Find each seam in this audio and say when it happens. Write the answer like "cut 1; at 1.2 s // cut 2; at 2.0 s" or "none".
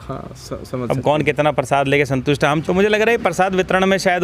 cut 1; at 2.6 s